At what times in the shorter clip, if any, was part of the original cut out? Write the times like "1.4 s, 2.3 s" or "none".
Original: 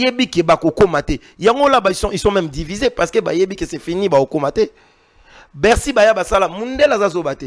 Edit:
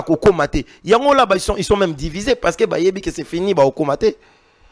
none